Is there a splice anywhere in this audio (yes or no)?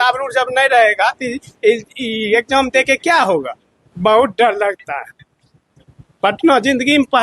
no